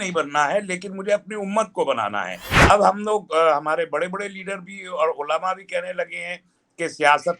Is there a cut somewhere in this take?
yes; 1 cut; at 2.6 s

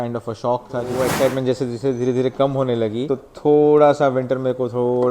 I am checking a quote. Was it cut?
yes; 2 cuts; at 1.0 s, 3.1 s

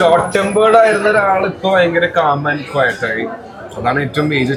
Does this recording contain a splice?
no; 0 cuts

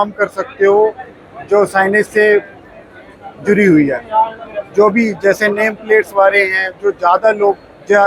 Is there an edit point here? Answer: no; 0 cuts

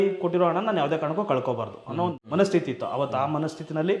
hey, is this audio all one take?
yes; 0 cuts

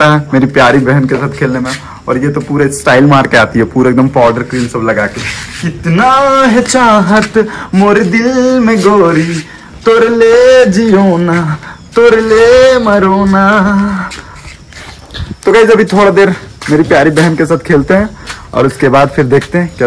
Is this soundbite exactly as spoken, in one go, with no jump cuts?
yes; 0 cuts

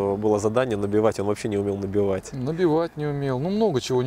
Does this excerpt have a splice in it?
no; 0 cuts

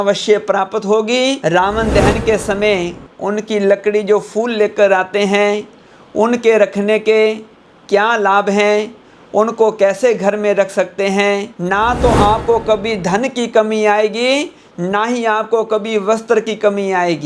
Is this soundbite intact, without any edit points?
no; 2 cuts; at 1.4 s, 11.5 s

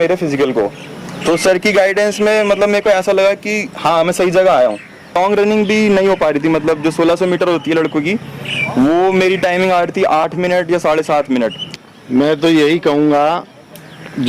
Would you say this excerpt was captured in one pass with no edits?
no; 2 cuts; at 5.2 s, 11.6 s

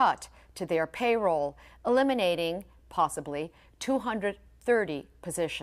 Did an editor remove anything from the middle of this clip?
yes; 1 cut; at 4.5 s

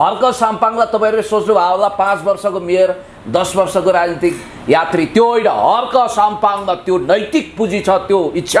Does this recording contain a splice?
no; 0 cuts

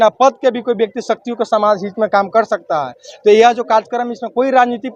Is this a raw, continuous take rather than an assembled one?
yes; 0 cuts

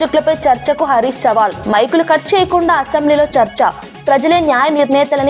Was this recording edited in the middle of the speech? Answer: no; 0 cuts

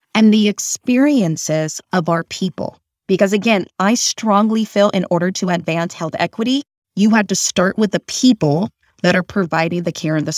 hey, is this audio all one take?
yes; 0 cuts

